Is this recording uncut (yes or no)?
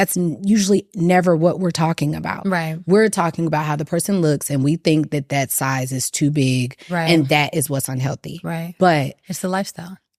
yes